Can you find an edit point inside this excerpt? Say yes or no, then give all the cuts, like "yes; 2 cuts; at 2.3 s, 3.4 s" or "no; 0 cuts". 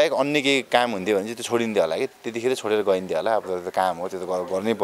no; 0 cuts